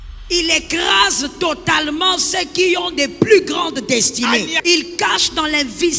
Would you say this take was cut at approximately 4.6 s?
yes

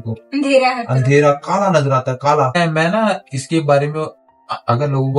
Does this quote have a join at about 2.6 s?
no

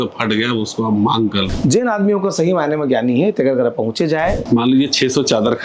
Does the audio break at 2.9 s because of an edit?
no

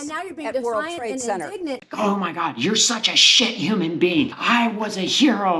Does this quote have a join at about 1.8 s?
yes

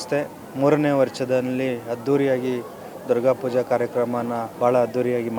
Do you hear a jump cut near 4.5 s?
yes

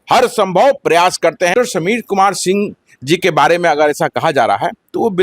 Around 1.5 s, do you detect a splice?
yes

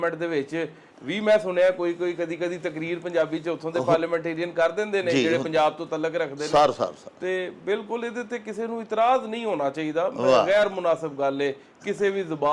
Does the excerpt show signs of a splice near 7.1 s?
no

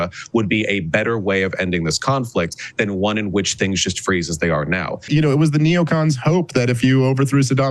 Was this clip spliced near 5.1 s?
yes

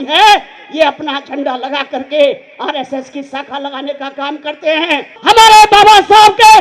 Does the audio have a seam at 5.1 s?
yes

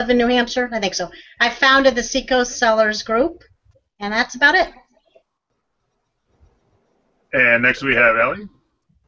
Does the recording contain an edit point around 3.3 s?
no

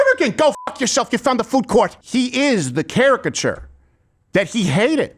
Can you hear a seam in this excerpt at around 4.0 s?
no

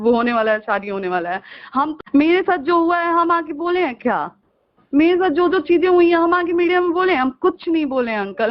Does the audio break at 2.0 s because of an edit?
yes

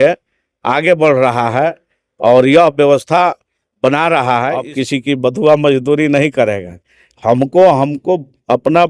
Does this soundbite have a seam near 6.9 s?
no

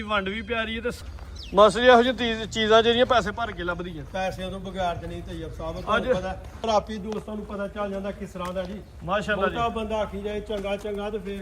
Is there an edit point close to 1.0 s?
yes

